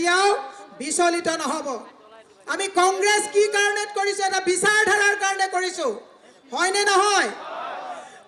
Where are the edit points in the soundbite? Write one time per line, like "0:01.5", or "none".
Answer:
none